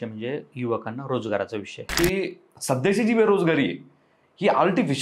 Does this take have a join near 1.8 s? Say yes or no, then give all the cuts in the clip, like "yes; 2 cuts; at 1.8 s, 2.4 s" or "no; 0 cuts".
yes; 1 cut; at 1.8 s